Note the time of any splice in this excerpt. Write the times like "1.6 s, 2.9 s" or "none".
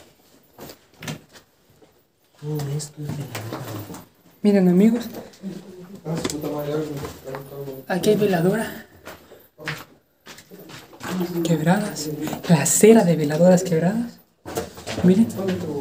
none